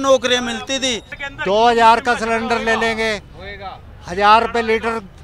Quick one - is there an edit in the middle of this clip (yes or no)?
yes